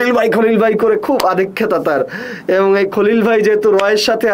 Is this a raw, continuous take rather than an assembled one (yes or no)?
yes